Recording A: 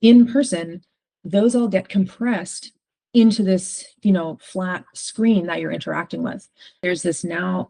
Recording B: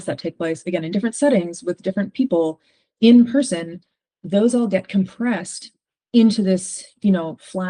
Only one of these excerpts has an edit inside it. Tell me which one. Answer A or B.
A